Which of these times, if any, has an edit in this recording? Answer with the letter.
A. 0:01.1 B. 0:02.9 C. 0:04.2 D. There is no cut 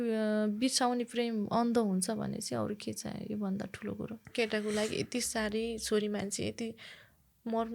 C